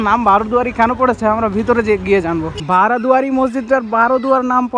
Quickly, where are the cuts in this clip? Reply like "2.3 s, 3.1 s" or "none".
2.6 s